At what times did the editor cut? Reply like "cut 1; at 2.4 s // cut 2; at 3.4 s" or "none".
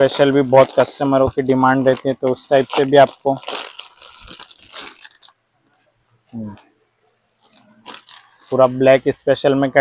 none